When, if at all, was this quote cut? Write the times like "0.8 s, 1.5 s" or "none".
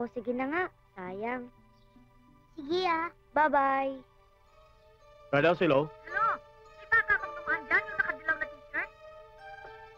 4.4 s

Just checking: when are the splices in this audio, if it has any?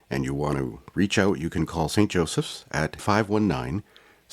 3.0 s

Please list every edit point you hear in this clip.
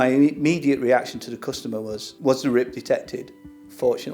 2.0 s

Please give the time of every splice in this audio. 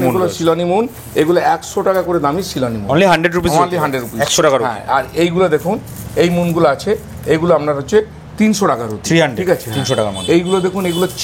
none

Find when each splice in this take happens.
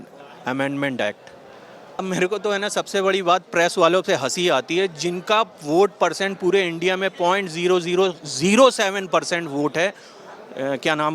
2.0 s

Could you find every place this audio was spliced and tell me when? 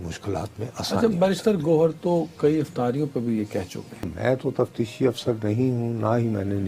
4.1 s

